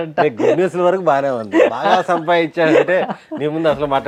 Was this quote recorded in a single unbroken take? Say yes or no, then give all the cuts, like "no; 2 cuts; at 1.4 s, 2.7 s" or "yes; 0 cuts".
yes; 0 cuts